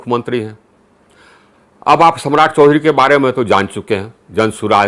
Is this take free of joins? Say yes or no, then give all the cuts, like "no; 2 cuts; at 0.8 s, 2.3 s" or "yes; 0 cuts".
yes; 0 cuts